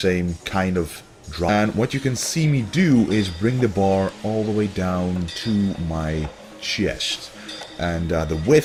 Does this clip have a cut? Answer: no; 0 cuts

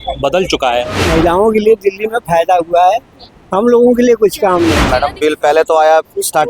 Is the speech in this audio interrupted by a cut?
yes; 2 cuts; at 1.0 s, 4.8 s

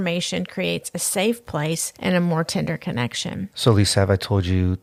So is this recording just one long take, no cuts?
yes; 0 cuts

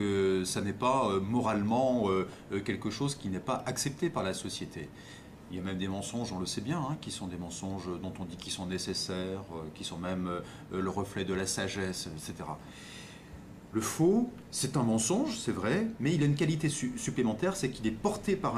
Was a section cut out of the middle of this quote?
no; 0 cuts

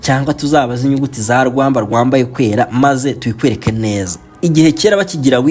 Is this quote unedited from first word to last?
yes; 0 cuts

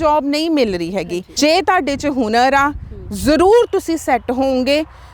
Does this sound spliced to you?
yes; 1 cut; at 1.3 s

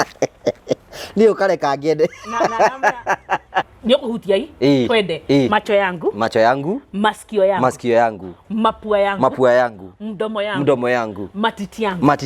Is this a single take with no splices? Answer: no; 1 cut; at 3.7 s

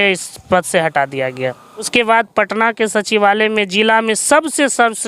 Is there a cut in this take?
yes; 1 cut; at 1.9 s

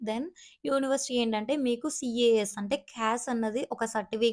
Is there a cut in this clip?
no; 0 cuts

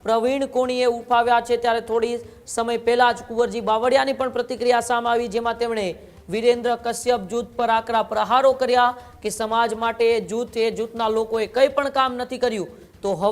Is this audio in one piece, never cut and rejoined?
yes; 0 cuts

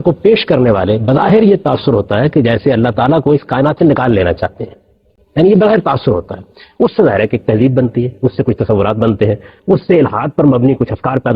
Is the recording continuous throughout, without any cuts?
yes; 0 cuts

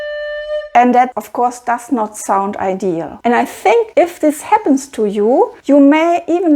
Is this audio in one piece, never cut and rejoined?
no; 3 cuts; at 3.1 s, 3.9 s, 5.6 s

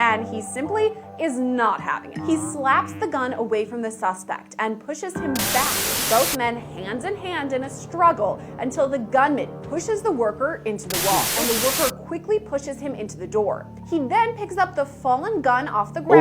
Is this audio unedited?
no; 2 cuts; at 5.9 s, 11.4 s

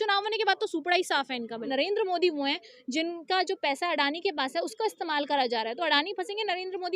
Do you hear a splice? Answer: yes; 1 cut; at 1.7 s

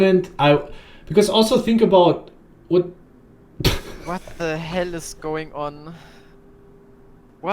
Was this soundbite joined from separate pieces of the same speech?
no; 0 cuts

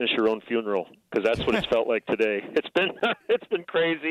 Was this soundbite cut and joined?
no; 0 cuts

